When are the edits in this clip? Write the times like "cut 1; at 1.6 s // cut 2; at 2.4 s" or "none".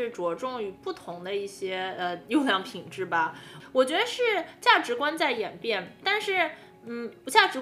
cut 1; at 2.2 s // cut 2; at 3.5 s